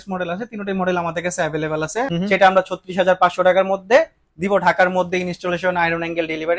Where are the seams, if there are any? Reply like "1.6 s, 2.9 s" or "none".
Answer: 2.1 s